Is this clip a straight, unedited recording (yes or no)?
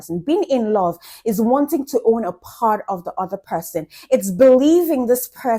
yes